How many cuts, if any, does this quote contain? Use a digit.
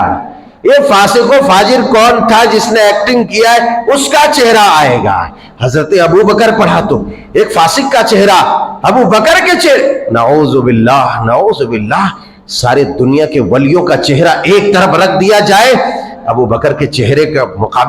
0